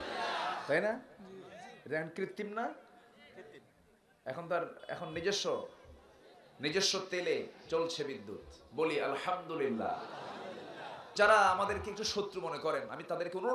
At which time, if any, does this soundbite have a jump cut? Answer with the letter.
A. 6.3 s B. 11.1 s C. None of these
B